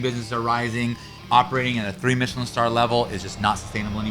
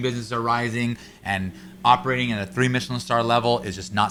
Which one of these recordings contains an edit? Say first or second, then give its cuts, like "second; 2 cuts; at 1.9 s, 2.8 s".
first; 1 cut; at 1.1 s